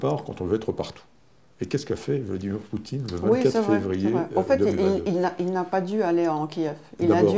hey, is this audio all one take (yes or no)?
yes